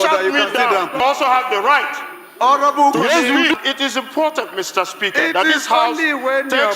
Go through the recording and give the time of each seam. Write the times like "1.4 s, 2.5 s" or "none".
1.2 s, 3.5 s